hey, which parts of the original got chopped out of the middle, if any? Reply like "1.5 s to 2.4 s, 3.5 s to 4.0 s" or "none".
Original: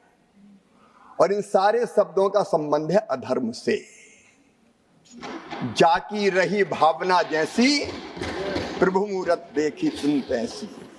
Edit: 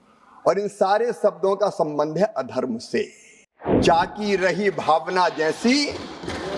4.5 s to 5.7 s

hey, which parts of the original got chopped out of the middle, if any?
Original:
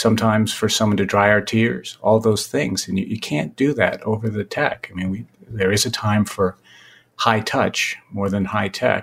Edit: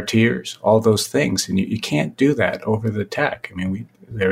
none

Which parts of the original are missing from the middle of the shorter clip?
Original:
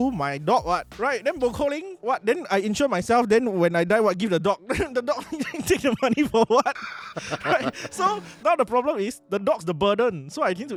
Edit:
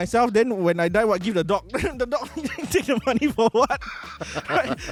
none

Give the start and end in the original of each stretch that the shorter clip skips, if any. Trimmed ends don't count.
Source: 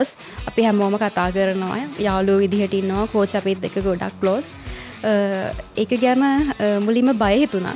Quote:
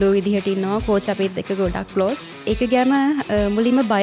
4.6 s to 5.6 s

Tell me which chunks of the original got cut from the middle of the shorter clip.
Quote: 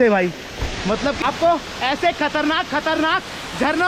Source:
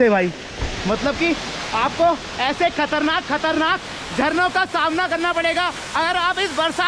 1.2 s to 1.8 s

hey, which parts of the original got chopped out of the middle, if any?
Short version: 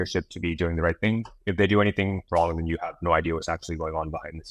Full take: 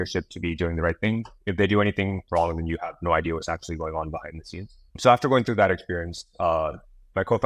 none

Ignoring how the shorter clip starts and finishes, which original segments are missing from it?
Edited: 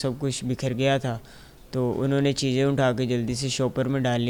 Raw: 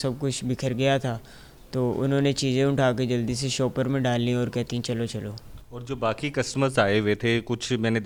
none

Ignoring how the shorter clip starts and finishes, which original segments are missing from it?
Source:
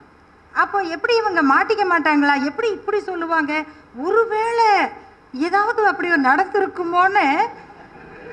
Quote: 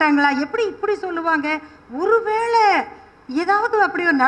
none

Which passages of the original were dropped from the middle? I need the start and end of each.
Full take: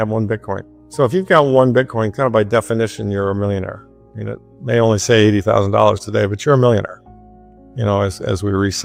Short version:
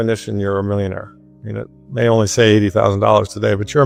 none

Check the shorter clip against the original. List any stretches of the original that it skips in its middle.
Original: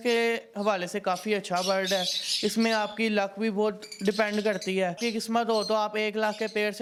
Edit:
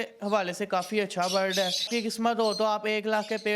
2.2 s to 5.0 s

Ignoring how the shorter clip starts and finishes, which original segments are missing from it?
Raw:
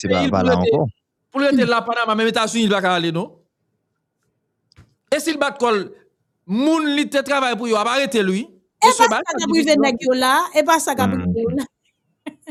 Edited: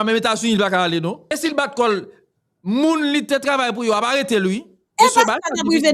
3.4 s to 5.1 s

